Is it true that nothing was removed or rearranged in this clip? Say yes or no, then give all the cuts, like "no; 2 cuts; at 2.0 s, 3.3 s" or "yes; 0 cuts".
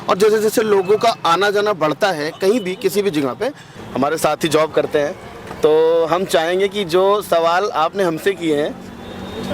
no; 1 cut; at 3.7 s